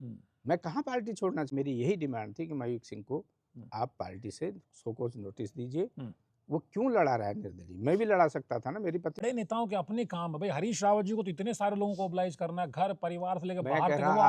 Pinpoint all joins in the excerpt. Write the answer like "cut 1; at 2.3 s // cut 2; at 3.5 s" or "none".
cut 1; at 1.5 s // cut 2; at 9.2 s